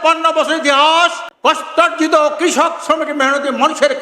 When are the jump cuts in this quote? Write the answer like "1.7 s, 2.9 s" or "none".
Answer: 1.3 s